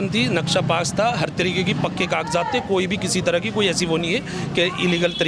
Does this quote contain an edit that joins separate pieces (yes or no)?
no